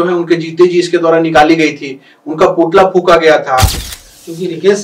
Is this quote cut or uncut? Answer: cut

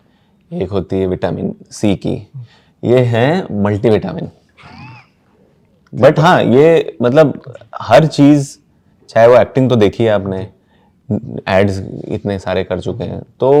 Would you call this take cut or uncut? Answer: uncut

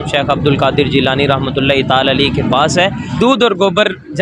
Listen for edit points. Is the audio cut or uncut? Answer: cut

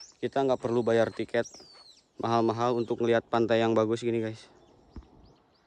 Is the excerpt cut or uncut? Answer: uncut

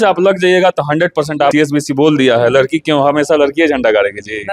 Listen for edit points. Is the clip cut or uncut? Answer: cut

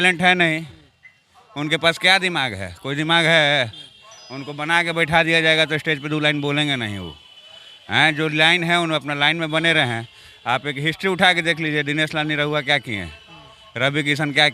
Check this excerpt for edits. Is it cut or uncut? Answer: uncut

